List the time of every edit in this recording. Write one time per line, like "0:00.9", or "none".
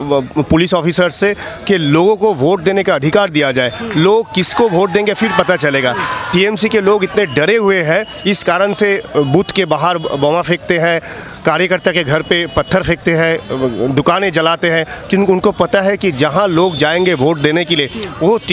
none